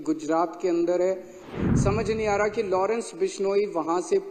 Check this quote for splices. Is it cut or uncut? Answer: cut